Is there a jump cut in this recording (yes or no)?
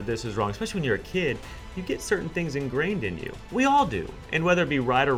no